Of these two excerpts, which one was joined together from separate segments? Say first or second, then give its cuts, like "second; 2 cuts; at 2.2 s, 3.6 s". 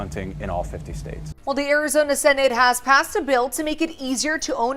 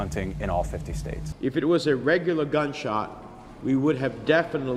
first; 1 cut; at 1.3 s